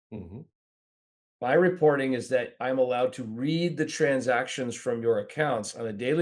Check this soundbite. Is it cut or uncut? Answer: uncut